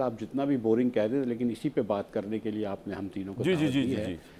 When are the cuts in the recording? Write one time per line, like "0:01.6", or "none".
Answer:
none